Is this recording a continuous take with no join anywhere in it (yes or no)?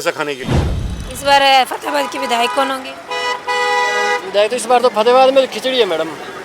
yes